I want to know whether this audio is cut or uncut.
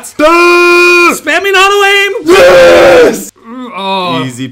cut